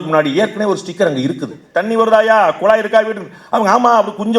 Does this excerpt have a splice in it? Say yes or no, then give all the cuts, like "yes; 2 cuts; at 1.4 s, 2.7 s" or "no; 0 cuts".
yes; 1 cut; at 1.6 s